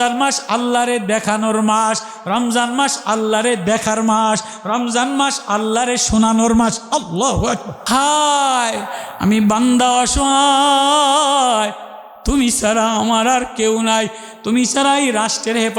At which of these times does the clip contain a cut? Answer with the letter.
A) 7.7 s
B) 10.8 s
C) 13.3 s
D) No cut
A